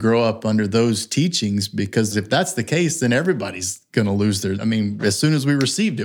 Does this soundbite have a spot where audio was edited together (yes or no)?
yes